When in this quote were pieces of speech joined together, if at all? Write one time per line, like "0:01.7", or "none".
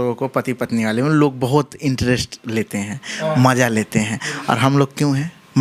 none